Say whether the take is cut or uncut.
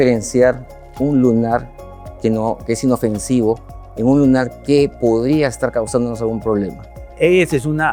uncut